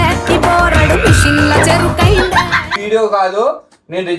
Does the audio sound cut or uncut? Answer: cut